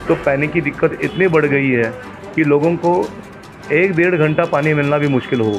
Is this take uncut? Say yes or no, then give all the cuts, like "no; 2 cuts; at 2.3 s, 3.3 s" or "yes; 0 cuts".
yes; 0 cuts